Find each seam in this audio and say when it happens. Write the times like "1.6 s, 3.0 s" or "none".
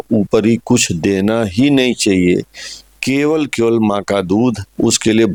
none